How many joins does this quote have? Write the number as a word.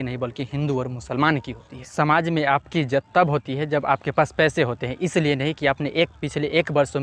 one